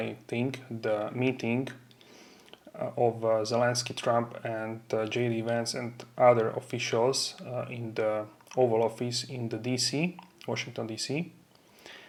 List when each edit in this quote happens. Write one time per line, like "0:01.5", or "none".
none